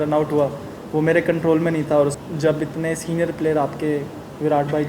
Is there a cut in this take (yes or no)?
yes